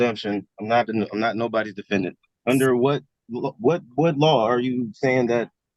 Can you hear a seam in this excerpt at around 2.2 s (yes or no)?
yes